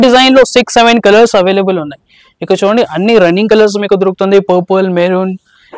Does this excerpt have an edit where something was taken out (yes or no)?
no